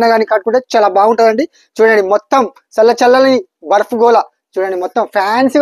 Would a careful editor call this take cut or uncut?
uncut